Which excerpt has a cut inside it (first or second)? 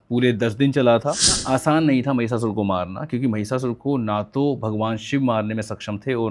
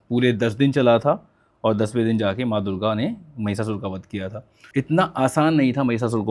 first